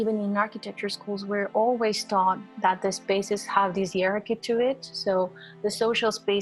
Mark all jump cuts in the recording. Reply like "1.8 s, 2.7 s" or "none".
none